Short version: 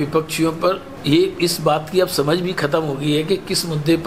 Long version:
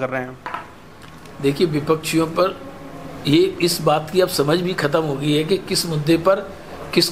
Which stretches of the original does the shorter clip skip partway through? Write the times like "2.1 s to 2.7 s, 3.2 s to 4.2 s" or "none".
2.7 s to 3.1 s